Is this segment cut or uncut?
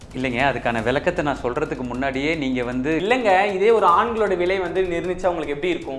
cut